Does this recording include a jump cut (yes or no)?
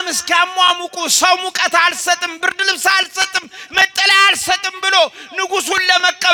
no